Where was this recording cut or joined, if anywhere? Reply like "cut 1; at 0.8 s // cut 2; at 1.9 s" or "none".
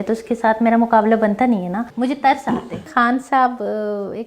cut 1; at 1.8 s // cut 2; at 2.9 s